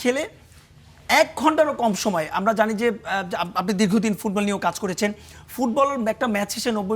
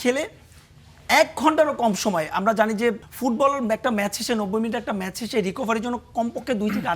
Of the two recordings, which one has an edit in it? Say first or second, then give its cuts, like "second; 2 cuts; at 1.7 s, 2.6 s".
second; 1 cut; at 3.0 s